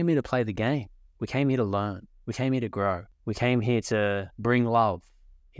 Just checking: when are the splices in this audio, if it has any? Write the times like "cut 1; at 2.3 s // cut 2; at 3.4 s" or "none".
cut 1; at 3.1 s // cut 2; at 4.3 s